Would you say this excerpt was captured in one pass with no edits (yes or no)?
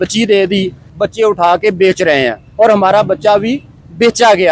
no